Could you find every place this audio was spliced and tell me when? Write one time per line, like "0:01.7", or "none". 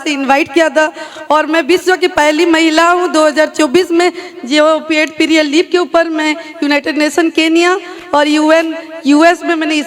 none